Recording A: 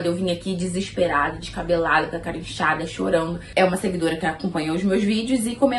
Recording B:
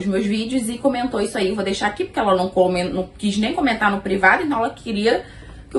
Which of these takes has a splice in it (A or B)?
A